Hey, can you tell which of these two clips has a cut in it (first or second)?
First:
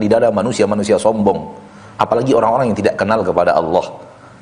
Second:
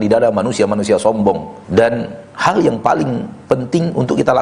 second